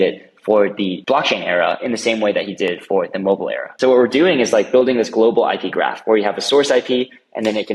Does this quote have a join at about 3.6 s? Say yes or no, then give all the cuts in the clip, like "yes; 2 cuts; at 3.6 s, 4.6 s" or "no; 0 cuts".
yes; 2 cuts; at 1.0 s, 3.6 s